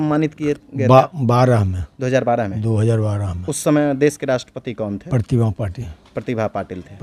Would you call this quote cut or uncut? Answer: uncut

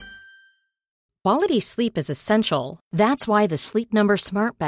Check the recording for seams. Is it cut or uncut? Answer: cut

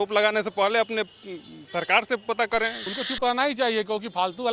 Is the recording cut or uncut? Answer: cut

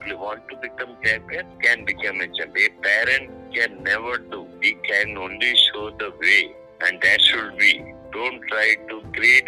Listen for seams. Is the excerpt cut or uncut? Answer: uncut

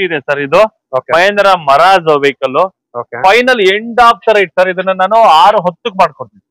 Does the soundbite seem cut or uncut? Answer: uncut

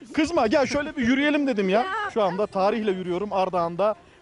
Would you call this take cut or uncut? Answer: cut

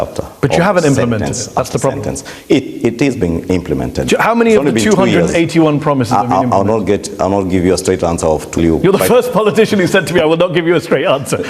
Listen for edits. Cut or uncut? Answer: cut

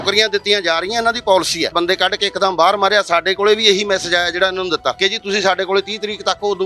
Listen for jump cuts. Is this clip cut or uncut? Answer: cut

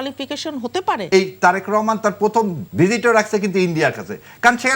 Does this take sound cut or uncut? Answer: cut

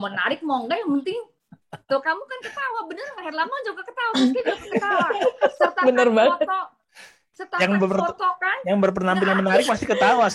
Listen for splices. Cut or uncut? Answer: uncut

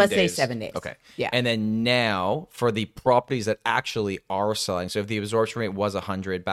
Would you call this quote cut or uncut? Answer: uncut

